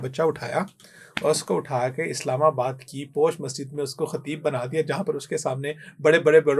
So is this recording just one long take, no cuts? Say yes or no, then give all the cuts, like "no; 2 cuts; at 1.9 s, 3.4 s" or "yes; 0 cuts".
yes; 0 cuts